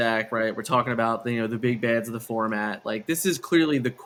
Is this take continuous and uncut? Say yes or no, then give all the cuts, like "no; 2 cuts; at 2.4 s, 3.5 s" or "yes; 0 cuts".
yes; 0 cuts